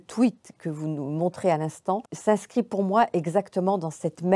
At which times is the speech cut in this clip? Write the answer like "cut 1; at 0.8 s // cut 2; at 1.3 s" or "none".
cut 1; at 2.1 s